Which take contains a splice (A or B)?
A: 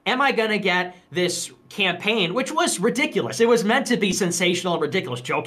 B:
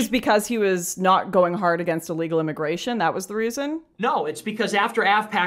B